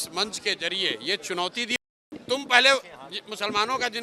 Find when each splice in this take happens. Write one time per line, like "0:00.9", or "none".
0:01.7